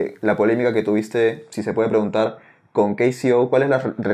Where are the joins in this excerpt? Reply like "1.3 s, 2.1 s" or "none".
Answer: none

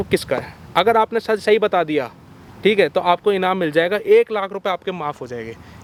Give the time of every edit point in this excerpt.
none

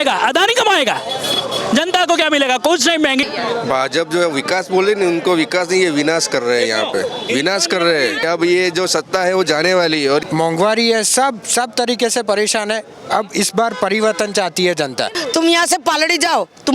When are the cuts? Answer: 3.3 s, 8.2 s, 10.2 s, 15.1 s

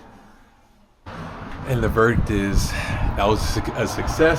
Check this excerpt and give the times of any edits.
1.1 s

